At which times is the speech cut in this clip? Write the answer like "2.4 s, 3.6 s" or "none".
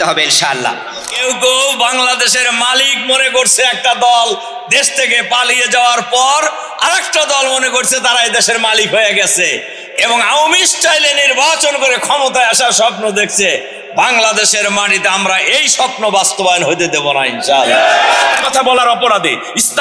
1.2 s, 18.4 s